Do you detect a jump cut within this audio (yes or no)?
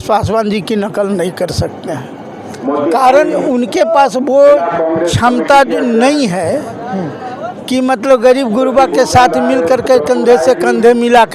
no